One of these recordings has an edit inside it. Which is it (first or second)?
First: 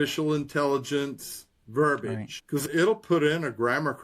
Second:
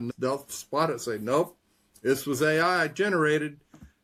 first